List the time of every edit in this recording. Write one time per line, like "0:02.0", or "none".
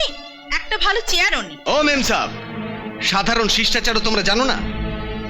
0:01.5